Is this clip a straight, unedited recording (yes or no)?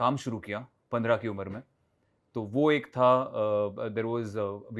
yes